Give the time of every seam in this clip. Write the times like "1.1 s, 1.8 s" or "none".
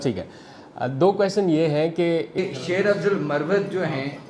2.4 s